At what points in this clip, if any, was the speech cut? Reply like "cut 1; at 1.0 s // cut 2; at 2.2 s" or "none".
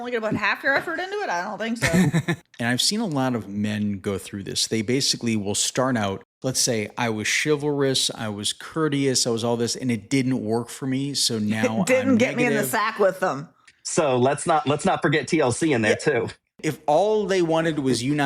cut 1; at 2.4 s // cut 2; at 6.3 s // cut 3; at 13.6 s // cut 4; at 16.7 s